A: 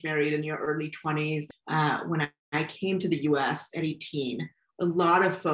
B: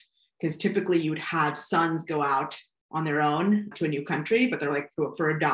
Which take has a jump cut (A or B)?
A